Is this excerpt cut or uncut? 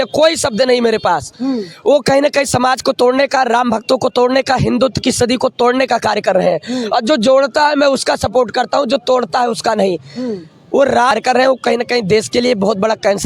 uncut